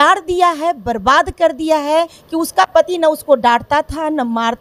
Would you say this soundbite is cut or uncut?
cut